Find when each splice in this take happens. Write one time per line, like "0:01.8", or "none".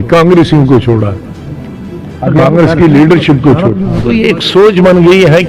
0:04.0